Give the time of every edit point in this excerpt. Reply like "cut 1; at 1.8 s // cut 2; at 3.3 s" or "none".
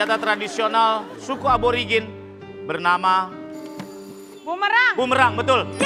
none